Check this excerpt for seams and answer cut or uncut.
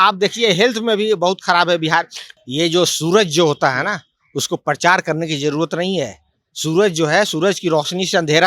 cut